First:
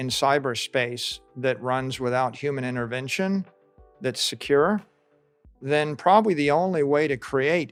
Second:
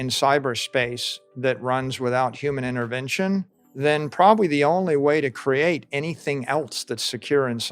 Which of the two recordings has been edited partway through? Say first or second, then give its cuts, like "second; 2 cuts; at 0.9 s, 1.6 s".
second; 1 cut; at 3.6 s